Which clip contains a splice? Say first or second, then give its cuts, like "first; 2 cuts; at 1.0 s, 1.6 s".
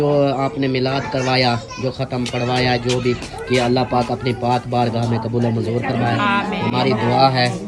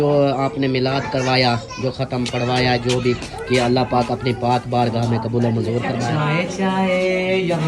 second; 1 cut; at 6.2 s